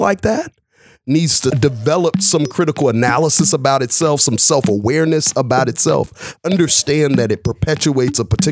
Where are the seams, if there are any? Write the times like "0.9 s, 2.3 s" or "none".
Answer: 1.6 s